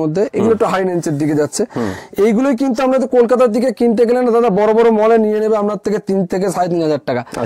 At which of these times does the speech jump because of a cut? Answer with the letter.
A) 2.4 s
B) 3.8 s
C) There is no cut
C